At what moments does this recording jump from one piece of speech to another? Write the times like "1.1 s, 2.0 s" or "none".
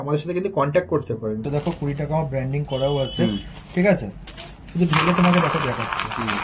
1.4 s

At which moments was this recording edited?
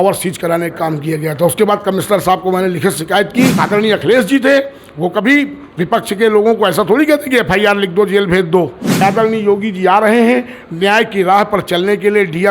3.6 s, 8.9 s

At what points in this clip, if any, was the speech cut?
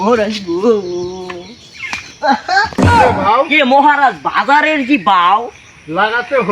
2.9 s

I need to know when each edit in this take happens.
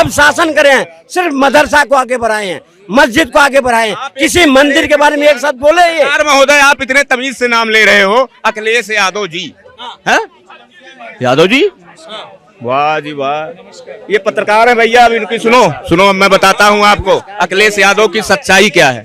none

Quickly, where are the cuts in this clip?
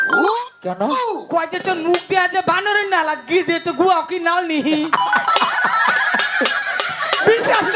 none

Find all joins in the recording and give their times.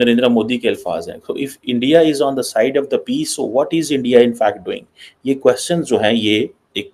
none

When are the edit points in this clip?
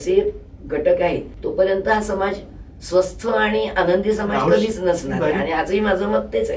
1.3 s

